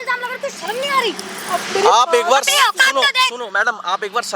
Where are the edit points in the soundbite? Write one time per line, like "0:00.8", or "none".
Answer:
none